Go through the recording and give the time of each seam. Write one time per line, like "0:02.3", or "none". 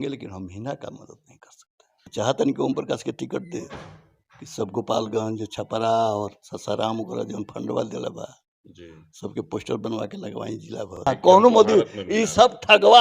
0:02.1
0:11.1